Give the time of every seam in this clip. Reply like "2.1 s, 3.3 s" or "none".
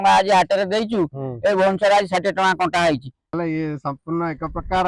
3.4 s